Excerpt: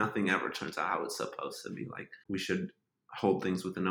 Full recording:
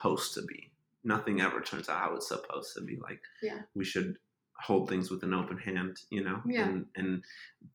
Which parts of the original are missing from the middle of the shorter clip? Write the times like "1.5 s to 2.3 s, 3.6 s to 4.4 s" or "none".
3.3 s to 3.6 s